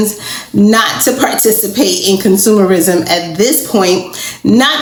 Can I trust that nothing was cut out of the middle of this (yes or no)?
yes